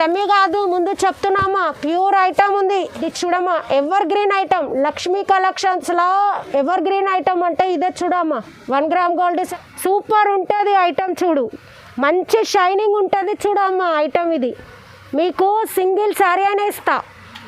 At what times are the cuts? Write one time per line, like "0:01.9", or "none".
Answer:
0:03.0
0:09.4